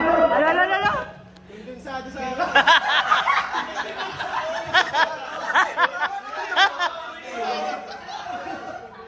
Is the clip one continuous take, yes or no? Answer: yes